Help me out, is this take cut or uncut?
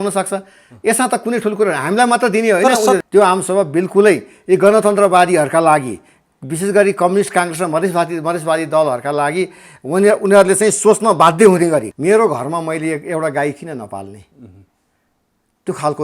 cut